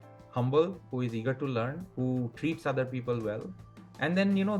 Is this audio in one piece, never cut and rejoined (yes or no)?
yes